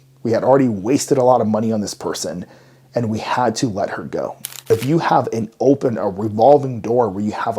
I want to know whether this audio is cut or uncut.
cut